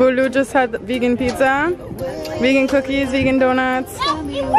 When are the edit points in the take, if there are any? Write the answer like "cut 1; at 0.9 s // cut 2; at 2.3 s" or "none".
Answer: none